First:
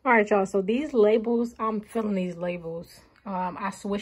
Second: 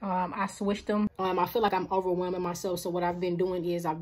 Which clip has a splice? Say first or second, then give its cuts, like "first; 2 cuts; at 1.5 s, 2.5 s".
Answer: second; 1 cut; at 1.7 s